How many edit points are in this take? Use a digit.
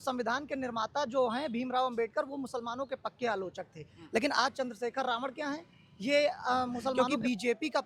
1